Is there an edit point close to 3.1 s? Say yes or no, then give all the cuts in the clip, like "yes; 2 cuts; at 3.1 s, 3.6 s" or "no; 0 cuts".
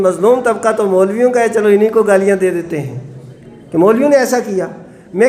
no; 0 cuts